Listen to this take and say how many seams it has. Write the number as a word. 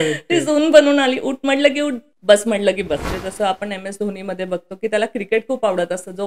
two